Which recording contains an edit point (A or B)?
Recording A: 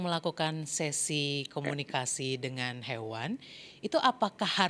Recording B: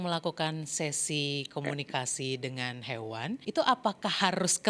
B